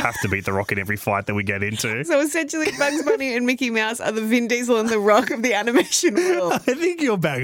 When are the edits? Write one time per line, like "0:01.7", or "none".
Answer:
0:02.0